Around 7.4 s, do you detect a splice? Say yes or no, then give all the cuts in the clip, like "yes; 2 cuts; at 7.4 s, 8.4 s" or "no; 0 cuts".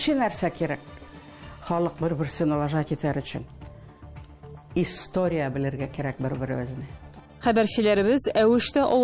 no; 0 cuts